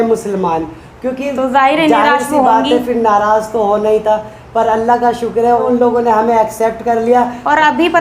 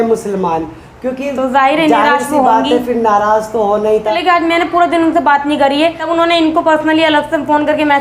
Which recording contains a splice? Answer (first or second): second